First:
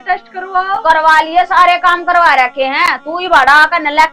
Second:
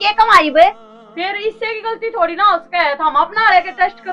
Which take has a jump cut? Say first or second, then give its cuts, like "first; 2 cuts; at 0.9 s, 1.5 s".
second; 1 cut; at 1.0 s